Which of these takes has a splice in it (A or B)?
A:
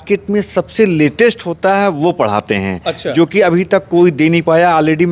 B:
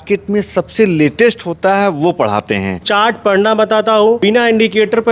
B